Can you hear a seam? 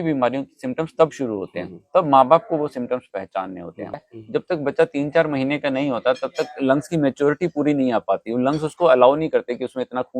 yes; 1 cut; at 4.0 s

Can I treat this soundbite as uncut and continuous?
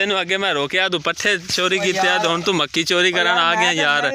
yes; 0 cuts

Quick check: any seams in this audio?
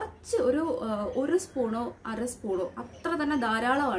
no; 0 cuts

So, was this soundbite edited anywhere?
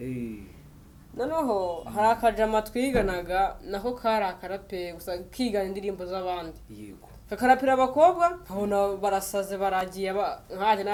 no; 0 cuts

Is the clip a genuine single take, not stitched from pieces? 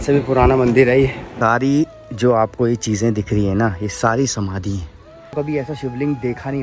no; 2 cuts; at 1.3 s, 5.3 s

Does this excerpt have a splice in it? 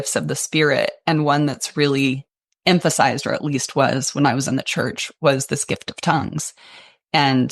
no; 0 cuts

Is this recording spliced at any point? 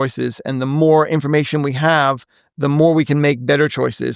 no; 0 cuts

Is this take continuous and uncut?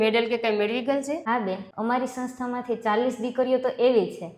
yes; 0 cuts

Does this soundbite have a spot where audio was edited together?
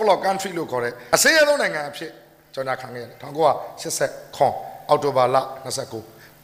yes; 1 cut; at 1.0 s

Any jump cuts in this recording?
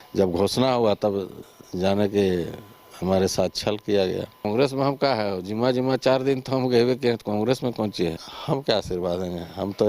yes; 2 cuts; at 4.4 s, 8.3 s

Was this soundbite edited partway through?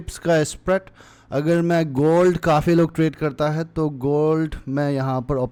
no; 0 cuts

